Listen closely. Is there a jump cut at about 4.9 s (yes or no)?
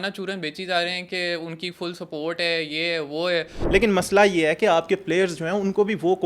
no